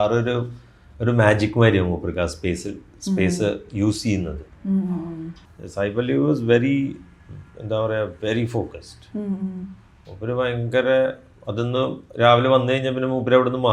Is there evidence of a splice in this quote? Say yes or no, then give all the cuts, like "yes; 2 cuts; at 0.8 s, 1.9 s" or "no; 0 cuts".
yes; 1 cut; at 5.3 s